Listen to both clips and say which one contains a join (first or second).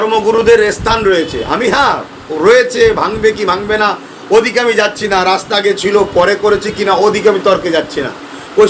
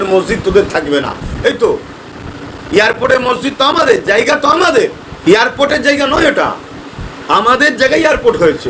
second